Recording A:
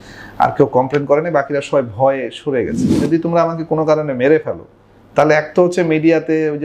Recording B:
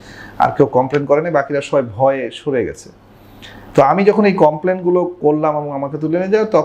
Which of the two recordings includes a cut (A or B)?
A